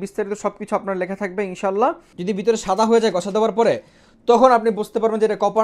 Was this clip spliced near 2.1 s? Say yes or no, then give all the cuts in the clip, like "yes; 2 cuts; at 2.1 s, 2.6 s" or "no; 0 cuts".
yes; 1 cut; at 2.1 s